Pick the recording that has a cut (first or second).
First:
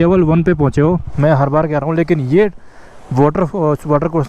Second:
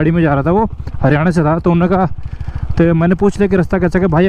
first